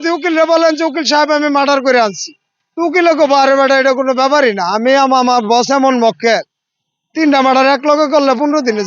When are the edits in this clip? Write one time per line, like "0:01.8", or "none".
none